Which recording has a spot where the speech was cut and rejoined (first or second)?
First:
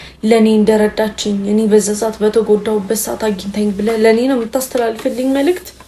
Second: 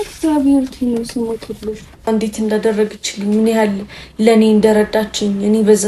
second